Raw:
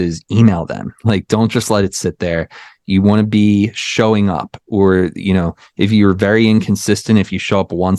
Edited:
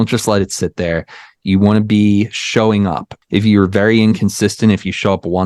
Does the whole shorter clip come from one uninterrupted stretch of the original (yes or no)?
no